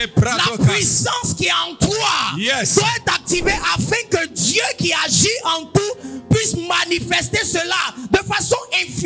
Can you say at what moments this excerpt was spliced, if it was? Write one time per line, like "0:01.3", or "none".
none